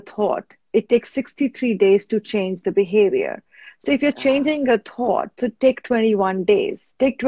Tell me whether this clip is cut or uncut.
uncut